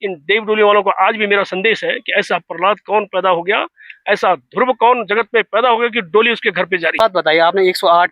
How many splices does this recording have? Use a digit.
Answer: 1